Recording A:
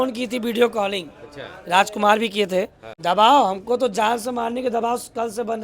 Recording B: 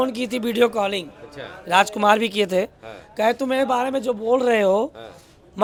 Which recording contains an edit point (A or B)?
A